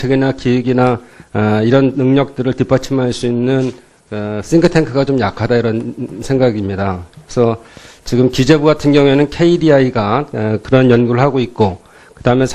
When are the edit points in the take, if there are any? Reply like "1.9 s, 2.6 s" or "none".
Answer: none